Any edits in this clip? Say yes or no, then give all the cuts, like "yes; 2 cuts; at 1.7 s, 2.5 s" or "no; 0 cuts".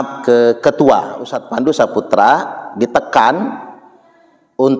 yes; 1 cut; at 1.4 s